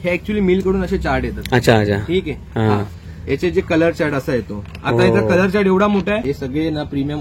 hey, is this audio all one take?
no; 1 cut; at 6.1 s

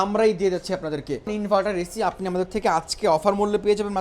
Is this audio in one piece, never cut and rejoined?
no; 1 cut; at 1.3 s

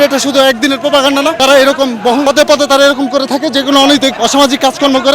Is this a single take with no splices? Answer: no; 3 cuts; at 1.4 s, 2.2 s, 4.1 s

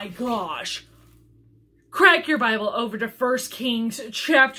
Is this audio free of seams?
yes; 0 cuts

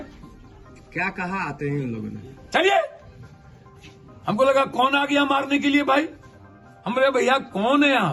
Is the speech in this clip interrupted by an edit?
no; 0 cuts

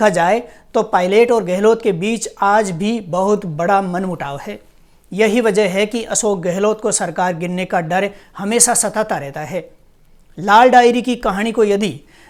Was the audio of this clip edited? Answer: no; 0 cuts

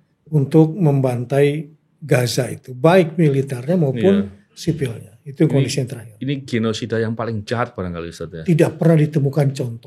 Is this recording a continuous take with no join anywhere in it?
yes; 0 cuts

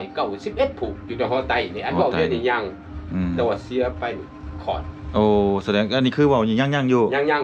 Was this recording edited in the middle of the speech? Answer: no; 0 cuts

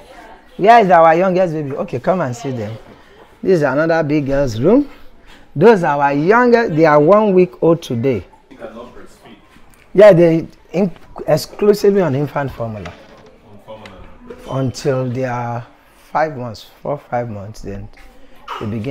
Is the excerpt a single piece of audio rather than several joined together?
no; 1 cut; at 8.5 s

